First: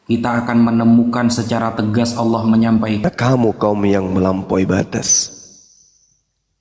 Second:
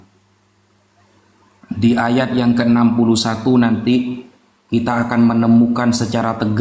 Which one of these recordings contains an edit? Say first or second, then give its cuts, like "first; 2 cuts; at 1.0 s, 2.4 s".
first; 1 cut; at 3.0 s